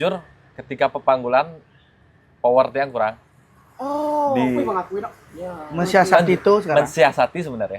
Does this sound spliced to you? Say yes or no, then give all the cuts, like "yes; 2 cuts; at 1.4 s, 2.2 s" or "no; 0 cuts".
no; 0 cuts